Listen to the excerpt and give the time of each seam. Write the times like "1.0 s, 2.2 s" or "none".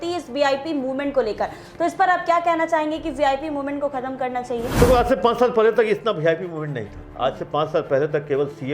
4.7 s